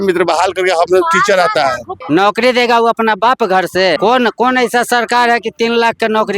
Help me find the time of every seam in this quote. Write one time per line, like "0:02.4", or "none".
0:01.9
0:04.0